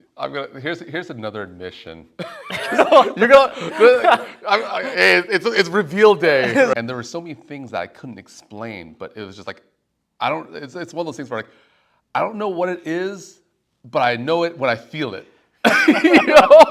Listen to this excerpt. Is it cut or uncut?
cut